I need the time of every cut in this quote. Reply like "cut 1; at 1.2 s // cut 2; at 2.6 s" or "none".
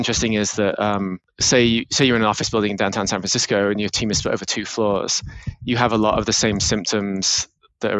cut 1; at 1.3 s